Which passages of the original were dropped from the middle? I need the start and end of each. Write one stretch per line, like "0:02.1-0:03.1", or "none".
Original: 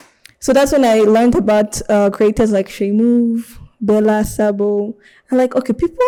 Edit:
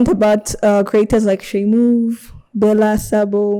none